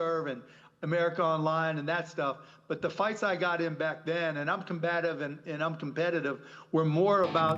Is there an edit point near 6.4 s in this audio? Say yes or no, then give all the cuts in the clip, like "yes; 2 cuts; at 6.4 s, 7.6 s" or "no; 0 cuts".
no; 0 cuts